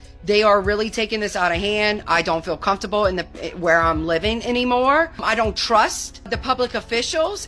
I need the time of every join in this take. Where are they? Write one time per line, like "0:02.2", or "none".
0:05.2
0:06.3

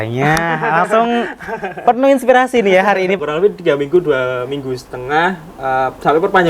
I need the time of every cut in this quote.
0:03.2

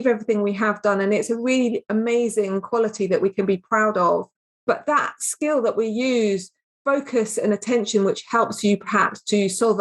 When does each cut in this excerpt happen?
none

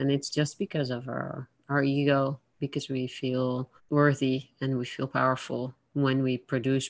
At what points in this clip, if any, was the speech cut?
0:03.8
0:05.8

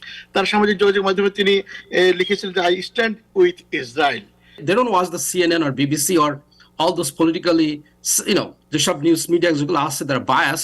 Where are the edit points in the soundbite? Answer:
0:04.6

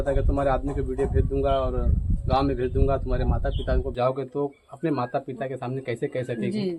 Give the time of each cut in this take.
0:03.9

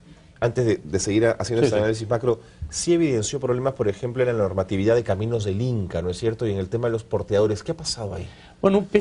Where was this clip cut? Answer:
none

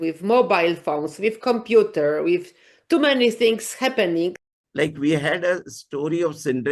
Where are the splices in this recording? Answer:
0:04.4

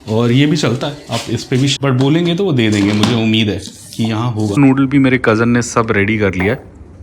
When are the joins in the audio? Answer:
0:01.7
0:04.5

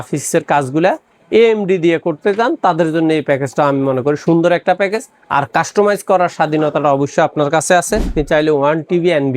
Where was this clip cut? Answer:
0:08.2

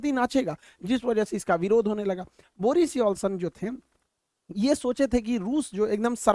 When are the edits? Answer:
none

